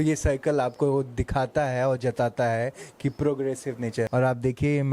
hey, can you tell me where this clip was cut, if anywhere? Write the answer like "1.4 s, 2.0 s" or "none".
3.4 s